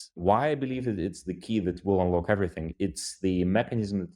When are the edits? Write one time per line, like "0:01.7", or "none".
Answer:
0:02.7